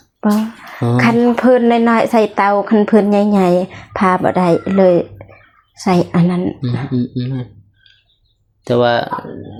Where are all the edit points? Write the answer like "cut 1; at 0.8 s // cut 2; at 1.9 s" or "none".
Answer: none